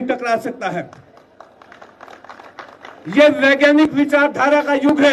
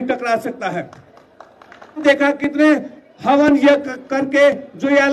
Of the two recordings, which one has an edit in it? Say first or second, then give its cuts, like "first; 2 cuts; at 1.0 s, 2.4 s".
second; 1 cut; at 2.0 s